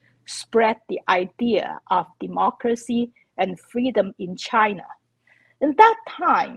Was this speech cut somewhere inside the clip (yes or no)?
no